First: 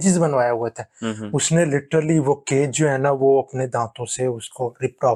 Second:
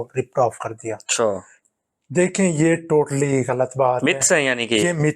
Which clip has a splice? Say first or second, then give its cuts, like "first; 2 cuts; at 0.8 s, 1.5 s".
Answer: second; 1 cut; at 1.6 s